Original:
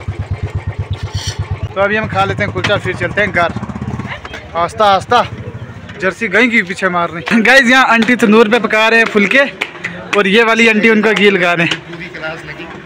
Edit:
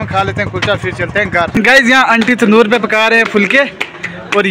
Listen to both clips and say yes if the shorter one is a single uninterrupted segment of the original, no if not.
no